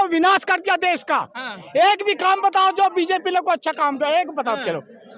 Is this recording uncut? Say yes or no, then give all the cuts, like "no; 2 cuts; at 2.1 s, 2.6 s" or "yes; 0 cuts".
yes; 0 cuts